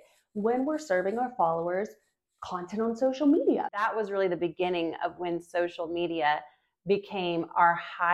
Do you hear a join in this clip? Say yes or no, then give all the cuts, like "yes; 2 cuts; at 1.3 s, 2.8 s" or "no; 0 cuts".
yes; 1 cut; at 4.0 s